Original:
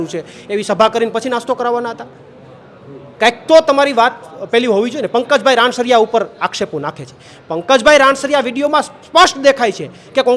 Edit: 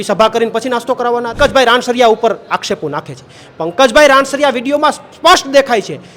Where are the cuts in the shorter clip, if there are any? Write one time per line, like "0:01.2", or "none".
0:01.4